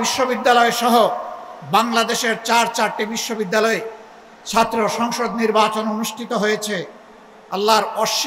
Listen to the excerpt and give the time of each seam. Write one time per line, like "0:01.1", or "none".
none

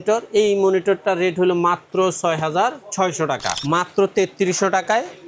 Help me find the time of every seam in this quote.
0:03.5

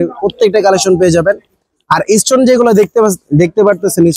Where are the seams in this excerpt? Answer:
none

